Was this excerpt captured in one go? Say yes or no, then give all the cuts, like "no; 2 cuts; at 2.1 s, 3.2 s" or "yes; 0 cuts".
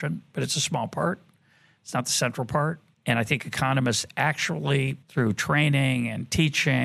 no; 2 cuts; at 2.9 s, 5.0 s